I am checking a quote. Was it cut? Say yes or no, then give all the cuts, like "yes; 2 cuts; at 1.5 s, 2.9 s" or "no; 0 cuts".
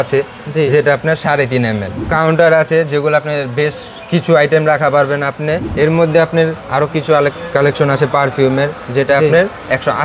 yes; 2 cuts; at 1.9 s, 5.7 s